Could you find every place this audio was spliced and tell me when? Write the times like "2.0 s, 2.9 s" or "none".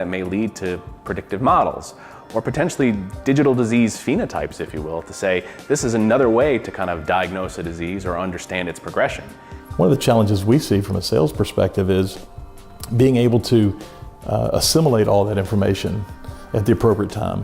9.6 s